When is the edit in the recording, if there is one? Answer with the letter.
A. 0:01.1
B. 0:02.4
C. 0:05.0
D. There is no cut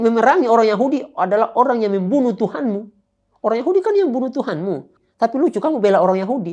C